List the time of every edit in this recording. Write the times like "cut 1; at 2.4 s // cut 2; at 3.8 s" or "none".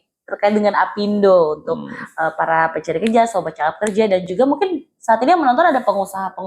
none